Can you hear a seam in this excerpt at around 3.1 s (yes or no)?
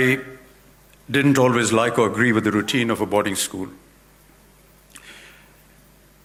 no